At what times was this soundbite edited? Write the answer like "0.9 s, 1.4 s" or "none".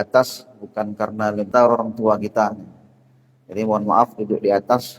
1.5 s